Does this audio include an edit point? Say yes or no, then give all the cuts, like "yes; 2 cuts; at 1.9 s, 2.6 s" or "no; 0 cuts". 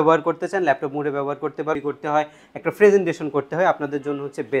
yes; 1 cut; at 1.8 s